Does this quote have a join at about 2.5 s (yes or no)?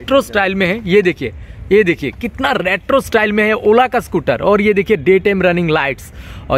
no